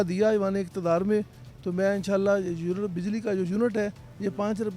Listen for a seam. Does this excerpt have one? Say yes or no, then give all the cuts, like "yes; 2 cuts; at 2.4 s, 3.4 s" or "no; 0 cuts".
no; 0 cuts